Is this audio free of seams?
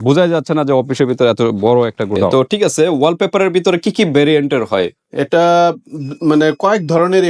no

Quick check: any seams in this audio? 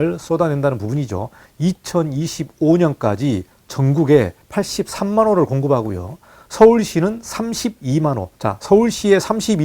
yes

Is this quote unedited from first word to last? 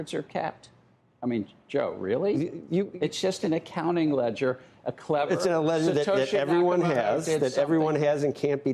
yes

